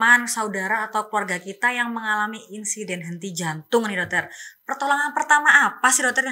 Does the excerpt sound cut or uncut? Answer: uncut